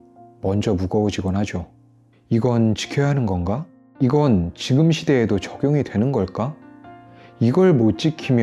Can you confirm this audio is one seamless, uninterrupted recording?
no; 1 cut; at 3.8 s

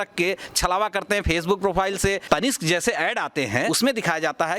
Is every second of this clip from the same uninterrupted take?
no; 2 cuts; at 2.2 s, 3.7 s

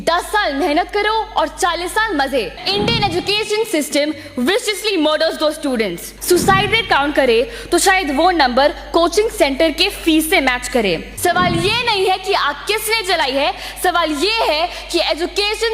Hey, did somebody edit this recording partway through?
yes; 3 cuts; at 2.6 s, 6.1 s, 11.1 s

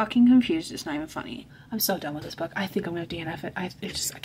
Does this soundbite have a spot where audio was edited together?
yes; 1 cut; at 1.4 s

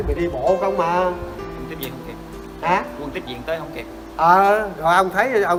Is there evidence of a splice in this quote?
no; 0 cuts

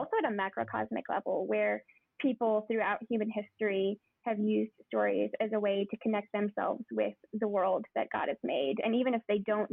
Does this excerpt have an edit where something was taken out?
no; 0 cuts

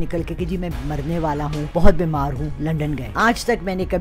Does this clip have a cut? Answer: yes; 2 cuts; at 1.7 s, 3.1 s

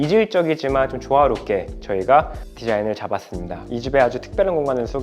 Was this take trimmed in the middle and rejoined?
yes; 1 cut; at 3.6 s

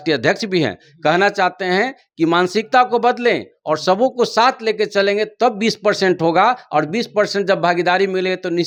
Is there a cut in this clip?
no; 0 cuts

